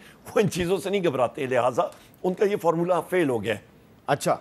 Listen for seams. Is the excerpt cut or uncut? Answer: uncut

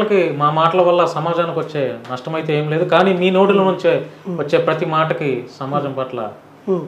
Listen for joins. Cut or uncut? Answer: uncut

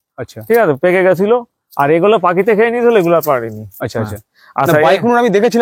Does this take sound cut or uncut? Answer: uncut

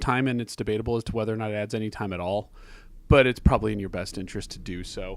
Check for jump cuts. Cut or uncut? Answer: uncut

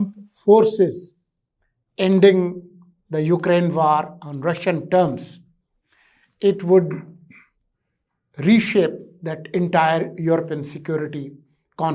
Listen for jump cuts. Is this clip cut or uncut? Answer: uncut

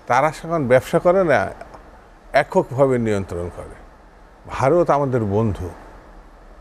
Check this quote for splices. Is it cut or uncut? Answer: uncut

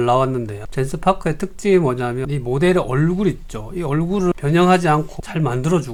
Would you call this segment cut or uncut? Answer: uncut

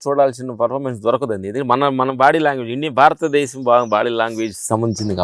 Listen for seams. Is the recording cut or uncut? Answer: uncut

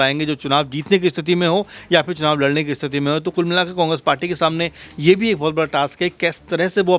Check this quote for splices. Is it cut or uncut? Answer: uncut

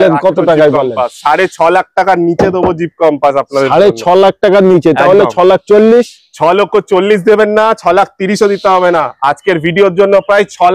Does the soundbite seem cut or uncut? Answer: uncut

